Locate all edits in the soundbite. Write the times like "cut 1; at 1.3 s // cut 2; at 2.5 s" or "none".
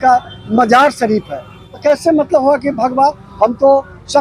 cut 1; at 1.7 s